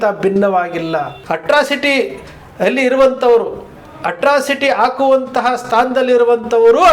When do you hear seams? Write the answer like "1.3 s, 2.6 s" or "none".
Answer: 1.2 s